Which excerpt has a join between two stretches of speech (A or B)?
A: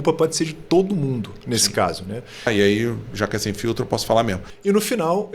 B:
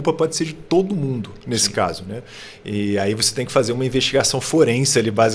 A